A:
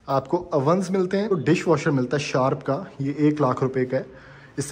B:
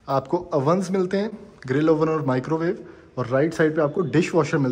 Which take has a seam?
A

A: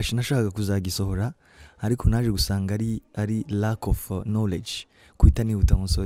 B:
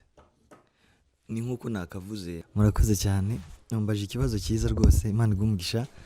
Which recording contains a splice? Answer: B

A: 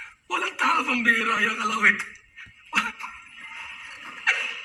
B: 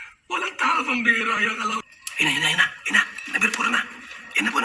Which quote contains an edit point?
B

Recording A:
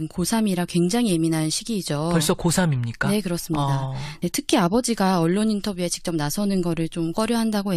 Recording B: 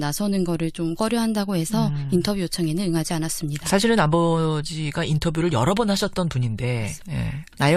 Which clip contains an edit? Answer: B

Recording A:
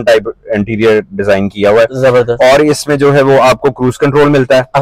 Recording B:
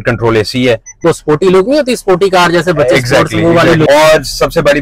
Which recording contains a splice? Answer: B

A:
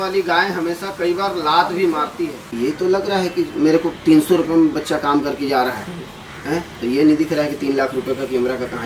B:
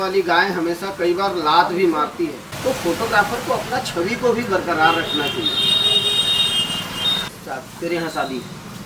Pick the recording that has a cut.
A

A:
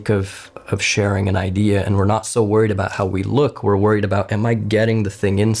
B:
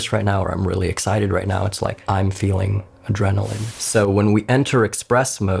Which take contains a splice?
B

